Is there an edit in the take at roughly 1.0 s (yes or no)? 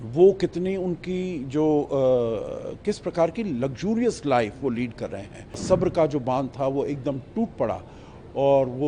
no